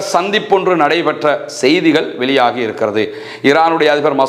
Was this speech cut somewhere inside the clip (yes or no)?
no